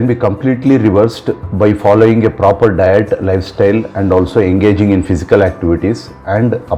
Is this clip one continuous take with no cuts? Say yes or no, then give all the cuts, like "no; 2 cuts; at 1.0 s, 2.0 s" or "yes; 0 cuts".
yes; 0 cuts